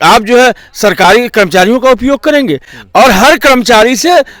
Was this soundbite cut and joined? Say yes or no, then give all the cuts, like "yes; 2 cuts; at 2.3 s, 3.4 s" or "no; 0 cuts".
no; 0 cuts